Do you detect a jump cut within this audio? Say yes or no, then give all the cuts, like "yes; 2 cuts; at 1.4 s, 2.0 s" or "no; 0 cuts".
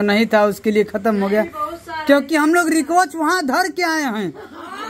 no; 0 cuts